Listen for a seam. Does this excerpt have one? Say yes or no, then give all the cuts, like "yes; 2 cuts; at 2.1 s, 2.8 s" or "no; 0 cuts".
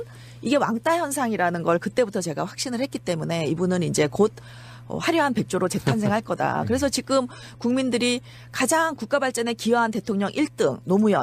yes; 1 cut; at 4.3 s